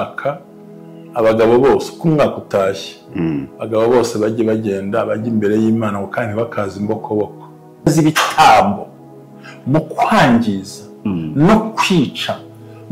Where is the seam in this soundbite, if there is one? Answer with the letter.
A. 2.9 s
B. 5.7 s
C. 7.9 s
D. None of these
C